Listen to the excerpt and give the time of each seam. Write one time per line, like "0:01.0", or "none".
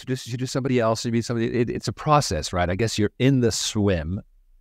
none